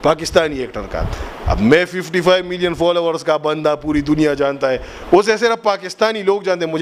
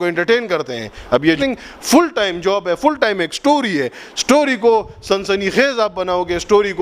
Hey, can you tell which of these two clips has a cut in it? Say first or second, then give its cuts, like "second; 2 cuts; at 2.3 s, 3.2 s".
second; 1 cut; at 1.3 s